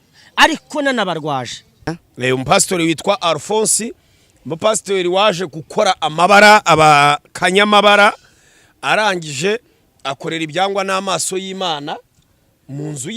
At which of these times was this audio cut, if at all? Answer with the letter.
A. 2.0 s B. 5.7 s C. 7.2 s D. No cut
A